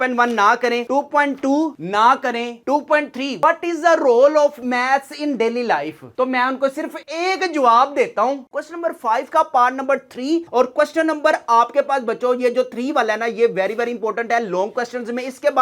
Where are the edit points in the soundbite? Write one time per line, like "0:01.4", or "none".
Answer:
0:03.4
0:08.5